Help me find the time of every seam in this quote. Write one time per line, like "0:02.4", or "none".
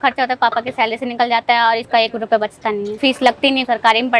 0:01.8
0:03.3